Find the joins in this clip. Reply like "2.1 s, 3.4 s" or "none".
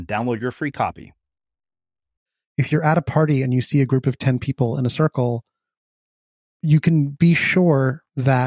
2.3 s, 6.5 s